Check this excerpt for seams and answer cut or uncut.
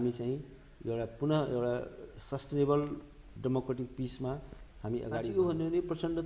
cut